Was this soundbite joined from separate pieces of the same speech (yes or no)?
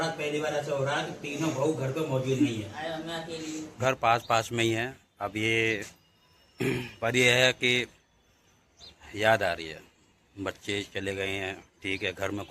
yes